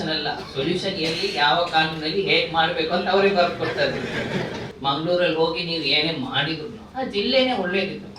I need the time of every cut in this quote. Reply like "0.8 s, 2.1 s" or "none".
4.6 s, 6.8 s